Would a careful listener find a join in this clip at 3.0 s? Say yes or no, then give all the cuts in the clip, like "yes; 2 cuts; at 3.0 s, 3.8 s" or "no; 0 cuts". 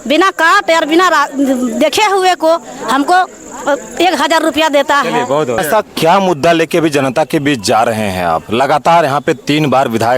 no; 1 cut; at 5.6 s